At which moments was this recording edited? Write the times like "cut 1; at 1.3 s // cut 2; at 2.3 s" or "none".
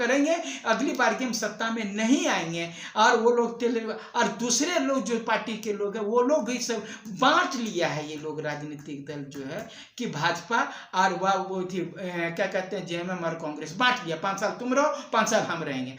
none